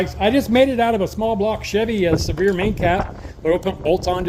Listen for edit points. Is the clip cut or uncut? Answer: uncut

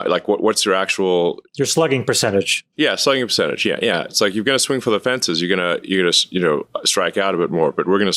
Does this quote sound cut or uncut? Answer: uncut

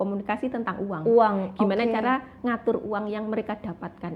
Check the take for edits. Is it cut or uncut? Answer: uncut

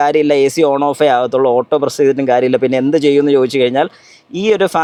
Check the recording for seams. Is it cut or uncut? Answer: uncut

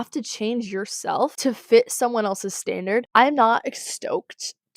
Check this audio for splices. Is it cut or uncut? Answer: cut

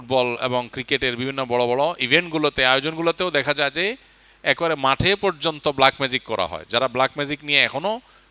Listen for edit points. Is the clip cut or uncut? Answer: uncut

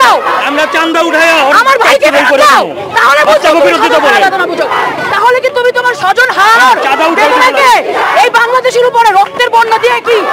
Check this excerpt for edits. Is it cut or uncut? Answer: uncut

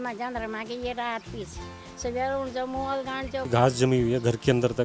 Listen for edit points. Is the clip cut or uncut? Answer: cut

